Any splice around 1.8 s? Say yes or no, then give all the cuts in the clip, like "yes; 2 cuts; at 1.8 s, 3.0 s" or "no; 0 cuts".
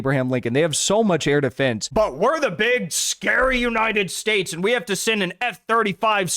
yes; 1 cut; at 1.8 s